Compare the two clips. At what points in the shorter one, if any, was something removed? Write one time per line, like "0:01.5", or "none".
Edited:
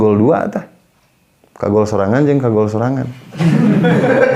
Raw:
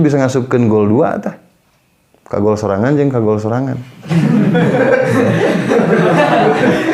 none